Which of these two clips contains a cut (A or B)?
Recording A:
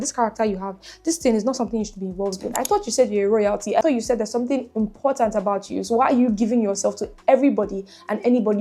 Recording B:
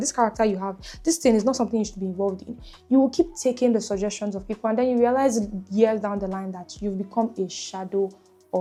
A